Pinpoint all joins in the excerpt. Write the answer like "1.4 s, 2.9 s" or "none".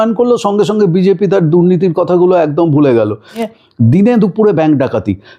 3.5 s